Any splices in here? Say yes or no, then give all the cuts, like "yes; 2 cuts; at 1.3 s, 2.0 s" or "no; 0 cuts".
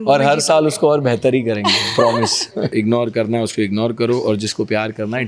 yes; 1 cut; at 2.7 s